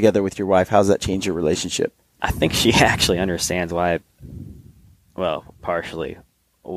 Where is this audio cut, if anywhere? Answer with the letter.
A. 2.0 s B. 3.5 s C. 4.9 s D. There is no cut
A